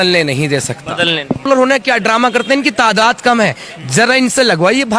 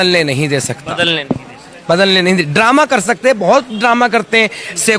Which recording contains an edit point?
first; 1 cut; at 1.4 s

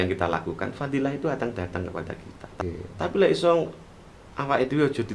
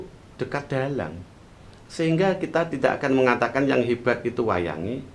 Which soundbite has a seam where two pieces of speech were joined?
first; 1 cut; at 2.6 s

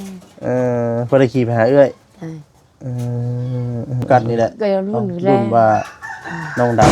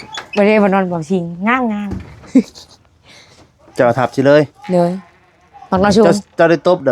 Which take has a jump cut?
first; 1 cut; at 4.1 s

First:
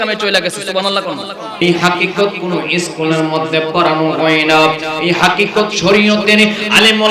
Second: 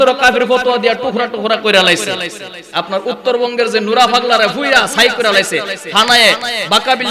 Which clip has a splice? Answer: first; 1 cut; at 1.6 s

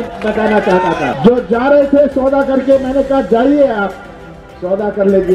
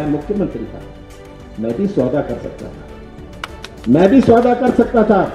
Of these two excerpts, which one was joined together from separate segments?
first; 1 cut; at 1.2 s

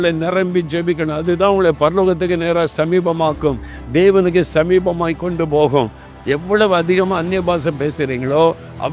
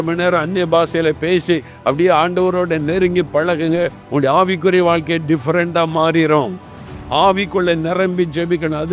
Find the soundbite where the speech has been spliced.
first; 1 cut; at 6.0 s

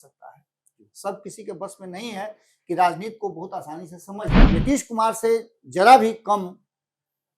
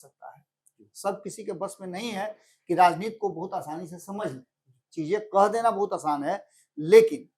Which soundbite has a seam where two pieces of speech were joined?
first; 1 cut; at 4.4 s

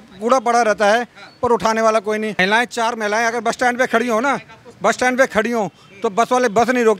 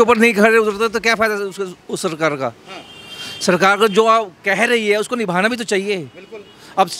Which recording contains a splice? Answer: first; 1 cut; at 2.4 s

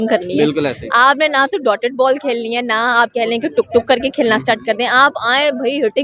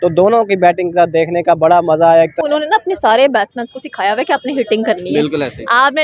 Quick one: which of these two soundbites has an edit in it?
second; 1 cut; at 2.3 s

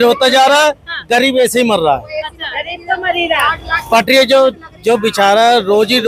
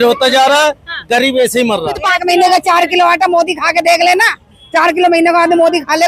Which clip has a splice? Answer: second; 1 cut; at 2.0 s

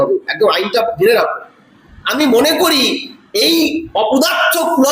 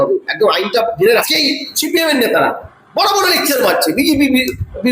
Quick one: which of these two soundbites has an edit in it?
second; 1 cut; at 1.2 s

